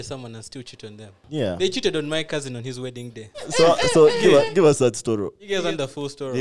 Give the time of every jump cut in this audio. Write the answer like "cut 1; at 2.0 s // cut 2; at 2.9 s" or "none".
cut 1; at 1.2 s // cut 2; at 3.5 s // cut 3; at 5.4 s